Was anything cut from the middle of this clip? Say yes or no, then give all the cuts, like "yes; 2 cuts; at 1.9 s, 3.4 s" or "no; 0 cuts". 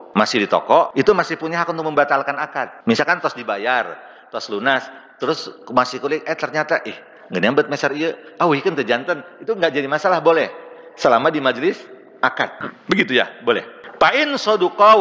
yes; 4 cuts; at 0.9 s, 2.7 s, 12.7 s, 13.8 s